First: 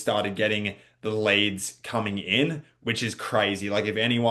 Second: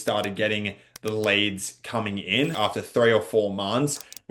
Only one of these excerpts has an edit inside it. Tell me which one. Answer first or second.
second